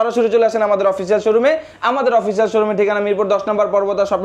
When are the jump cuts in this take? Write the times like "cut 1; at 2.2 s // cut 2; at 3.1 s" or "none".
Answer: none